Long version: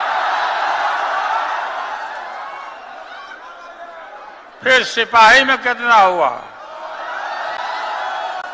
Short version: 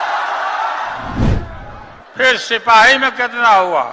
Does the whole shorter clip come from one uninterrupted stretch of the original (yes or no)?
no